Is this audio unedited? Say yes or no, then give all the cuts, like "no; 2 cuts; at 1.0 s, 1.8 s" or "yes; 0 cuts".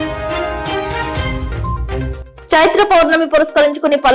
no; 2 cuts; at 0.7 s, 2.1 s